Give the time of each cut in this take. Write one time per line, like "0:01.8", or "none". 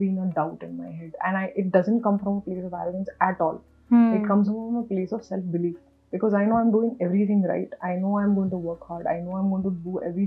none